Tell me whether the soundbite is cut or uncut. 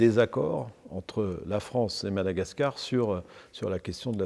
uncut